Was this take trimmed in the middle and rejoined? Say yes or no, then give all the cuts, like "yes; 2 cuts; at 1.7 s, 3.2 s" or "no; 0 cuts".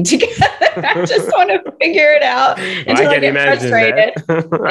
no; 0 cuts